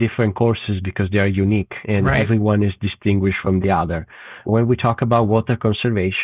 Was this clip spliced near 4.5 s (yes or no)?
yes